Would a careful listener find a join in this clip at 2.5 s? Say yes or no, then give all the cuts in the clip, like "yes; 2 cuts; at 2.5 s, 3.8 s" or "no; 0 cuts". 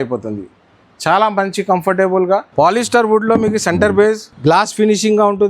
yes; 2 cuts; at 2.5 s, 4.3 s